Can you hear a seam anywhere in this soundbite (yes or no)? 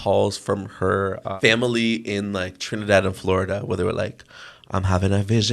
yes